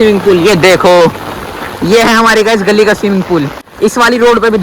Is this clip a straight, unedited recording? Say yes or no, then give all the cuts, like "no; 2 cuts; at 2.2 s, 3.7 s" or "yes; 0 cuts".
no; 1 cut; at 3.6 s